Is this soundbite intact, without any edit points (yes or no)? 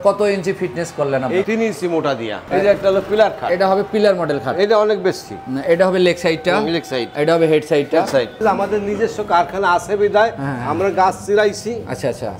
no